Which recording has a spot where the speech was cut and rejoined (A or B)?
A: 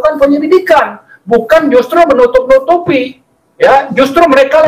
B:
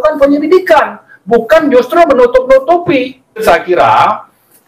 B